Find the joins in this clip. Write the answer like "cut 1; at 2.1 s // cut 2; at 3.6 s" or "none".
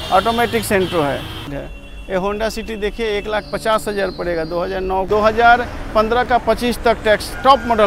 cut 1; at 1.6 s // cut 2; at 5.1 s